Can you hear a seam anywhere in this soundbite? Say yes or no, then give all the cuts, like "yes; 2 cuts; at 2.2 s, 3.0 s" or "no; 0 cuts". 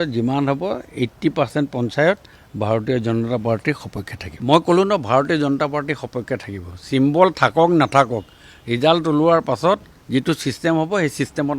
no; 0 cuts